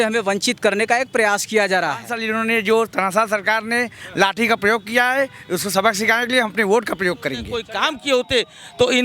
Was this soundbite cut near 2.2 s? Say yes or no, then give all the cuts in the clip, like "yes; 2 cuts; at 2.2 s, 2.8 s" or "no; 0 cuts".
yes; 2 cuts; at 2.2 s, 7.5 s